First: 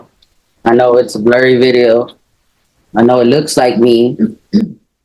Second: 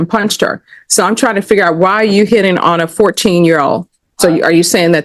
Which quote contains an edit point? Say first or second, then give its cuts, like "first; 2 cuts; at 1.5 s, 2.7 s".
second; 1 cut; at 3.8 s